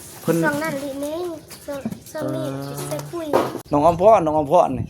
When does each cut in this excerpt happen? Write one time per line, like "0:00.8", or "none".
0:03.6